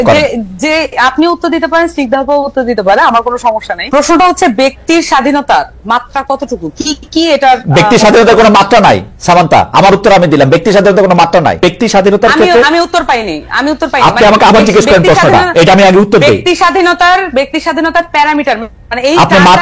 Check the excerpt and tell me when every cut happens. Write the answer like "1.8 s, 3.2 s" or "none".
3.7 s, 11.6 s